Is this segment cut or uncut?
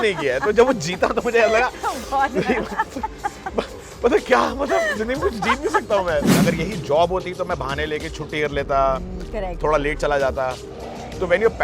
cut